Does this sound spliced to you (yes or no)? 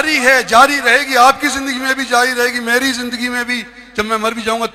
no